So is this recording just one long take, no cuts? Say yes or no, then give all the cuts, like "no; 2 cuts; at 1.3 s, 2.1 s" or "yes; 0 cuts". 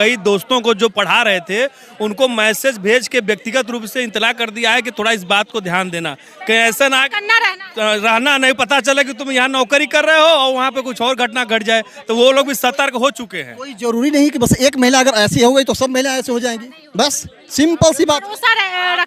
yes; 0 cuts